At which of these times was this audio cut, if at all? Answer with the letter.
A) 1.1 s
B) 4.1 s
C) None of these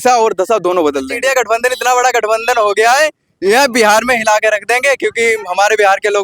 A